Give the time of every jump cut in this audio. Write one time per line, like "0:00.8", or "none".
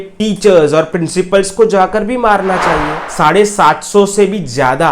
0:03.0